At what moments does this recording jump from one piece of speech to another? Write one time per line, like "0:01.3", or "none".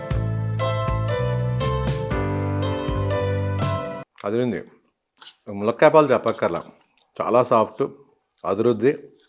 0:05.3